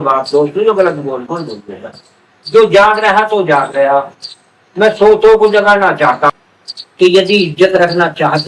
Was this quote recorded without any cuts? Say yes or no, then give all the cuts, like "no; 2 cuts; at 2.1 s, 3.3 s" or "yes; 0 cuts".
no; 1 cut; at 6.3 s